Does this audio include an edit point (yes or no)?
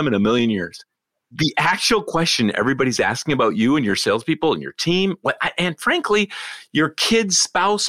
yes